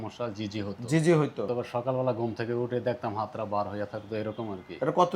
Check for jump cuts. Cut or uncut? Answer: cut